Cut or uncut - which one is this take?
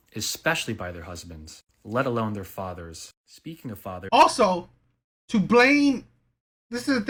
uncut